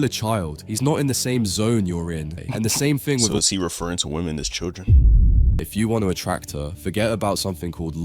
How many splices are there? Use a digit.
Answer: 2